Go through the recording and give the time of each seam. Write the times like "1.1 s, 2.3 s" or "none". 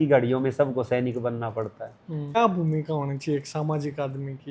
2.4 s